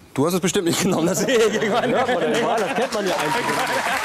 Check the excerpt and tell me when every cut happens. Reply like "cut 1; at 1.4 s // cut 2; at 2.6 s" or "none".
none